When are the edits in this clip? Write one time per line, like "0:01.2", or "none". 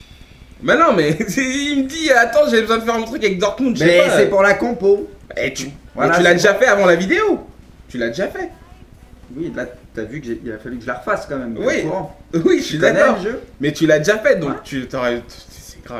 none